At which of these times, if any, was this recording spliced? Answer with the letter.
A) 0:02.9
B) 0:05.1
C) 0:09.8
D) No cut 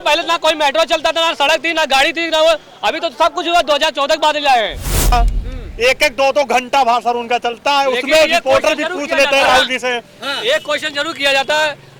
B